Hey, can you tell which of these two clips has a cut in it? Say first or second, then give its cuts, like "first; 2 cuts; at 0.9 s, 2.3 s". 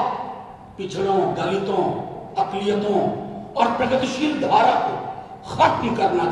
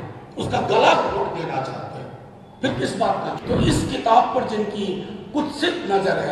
second; 1 cut; at 3.4 s